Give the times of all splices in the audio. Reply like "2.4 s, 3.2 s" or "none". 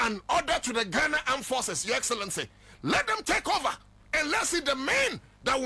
none